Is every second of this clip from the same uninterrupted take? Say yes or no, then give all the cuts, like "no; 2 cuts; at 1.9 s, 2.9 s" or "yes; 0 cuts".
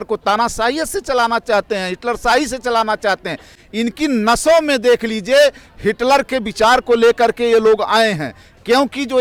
yes; 0 cuts